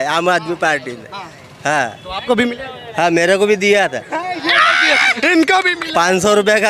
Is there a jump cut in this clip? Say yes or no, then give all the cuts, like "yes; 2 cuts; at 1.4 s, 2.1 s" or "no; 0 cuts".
no; 0 cuts